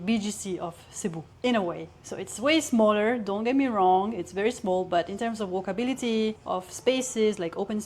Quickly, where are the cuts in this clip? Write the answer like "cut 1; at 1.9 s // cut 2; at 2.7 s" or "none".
cut 1; at 1.3 s // cut 2; at 6.4 s